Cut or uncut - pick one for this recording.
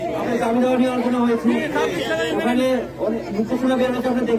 uncut